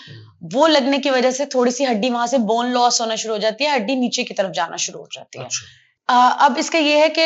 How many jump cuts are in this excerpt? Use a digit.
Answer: 0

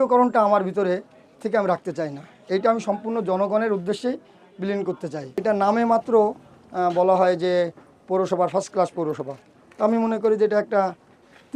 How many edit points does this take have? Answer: 1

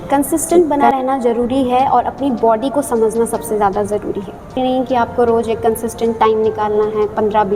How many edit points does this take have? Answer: 1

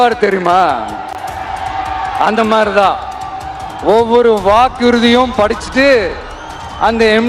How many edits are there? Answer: 0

